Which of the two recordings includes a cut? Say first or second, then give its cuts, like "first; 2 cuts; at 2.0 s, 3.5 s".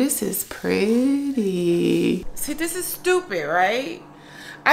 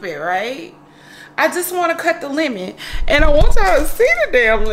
first; 1 cut; at 2.2 s